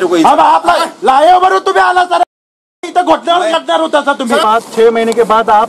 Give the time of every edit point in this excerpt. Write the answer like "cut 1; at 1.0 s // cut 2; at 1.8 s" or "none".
cut 1; at 4.4 s

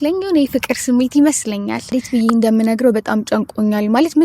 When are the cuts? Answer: cut 1; at 1.7 s

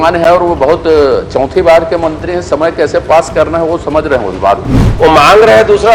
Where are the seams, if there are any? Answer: cut 1; at 4.8 s

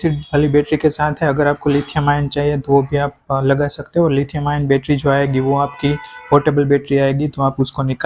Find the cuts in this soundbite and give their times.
none

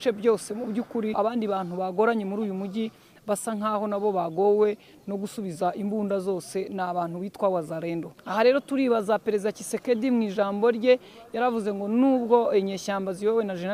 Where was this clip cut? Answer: cut 1; at 1.1 s // cut 2; at 8.2 s

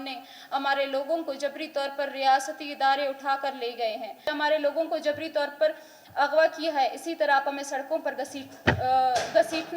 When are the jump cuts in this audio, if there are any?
cut 1; at 4.3 s

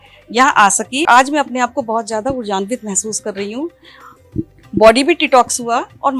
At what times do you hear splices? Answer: cut 1; at 1.0 s

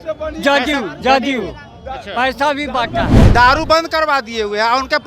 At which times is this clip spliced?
cut 1; at 3.2 s

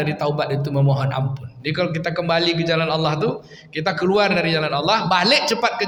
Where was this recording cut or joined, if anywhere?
none

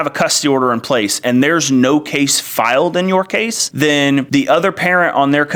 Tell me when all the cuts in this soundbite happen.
none

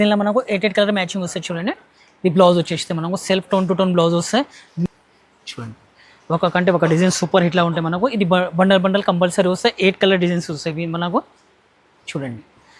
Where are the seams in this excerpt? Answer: cut 1; at 4.9 s

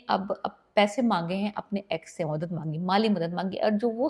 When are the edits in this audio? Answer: none

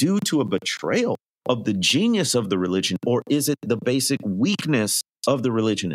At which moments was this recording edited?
cut 1; at 1.3 s // cut 2; at 5.0 s

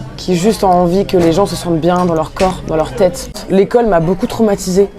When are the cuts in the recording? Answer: cut 1; at 3.3 s

